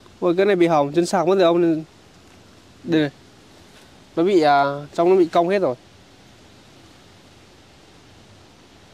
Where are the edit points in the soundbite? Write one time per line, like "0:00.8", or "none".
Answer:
none